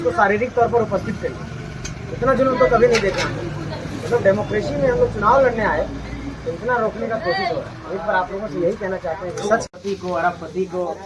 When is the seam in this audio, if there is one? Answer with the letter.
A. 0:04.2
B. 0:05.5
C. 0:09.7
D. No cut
C